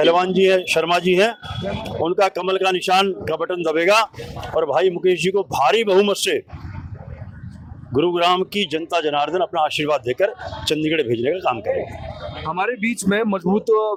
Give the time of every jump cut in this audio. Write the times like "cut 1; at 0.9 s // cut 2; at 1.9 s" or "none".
none